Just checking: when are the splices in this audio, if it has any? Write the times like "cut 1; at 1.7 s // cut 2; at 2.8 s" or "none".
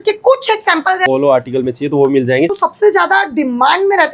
cut 1; at 1.1 s // cut 2; at 2.6 s